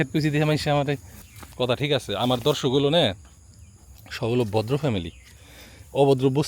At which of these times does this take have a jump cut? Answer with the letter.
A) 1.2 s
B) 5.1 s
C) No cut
A